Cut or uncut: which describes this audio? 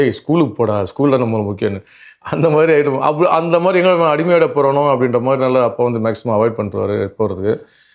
uncut